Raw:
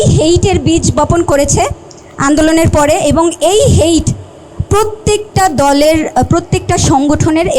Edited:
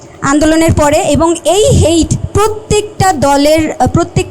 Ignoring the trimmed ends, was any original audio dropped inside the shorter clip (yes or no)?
yes